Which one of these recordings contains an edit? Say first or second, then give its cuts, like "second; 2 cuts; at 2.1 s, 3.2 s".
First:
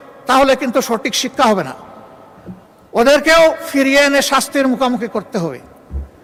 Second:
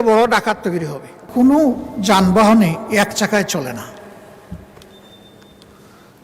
second; 1 cut; at 1.3 s